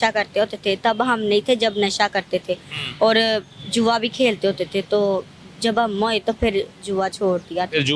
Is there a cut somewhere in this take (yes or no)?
no